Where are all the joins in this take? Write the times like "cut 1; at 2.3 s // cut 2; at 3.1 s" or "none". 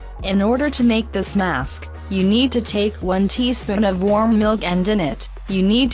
cut 1; at 4.4 s